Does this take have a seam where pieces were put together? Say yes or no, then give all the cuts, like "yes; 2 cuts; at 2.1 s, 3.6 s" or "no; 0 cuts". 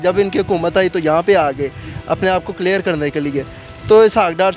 no; 0 cuts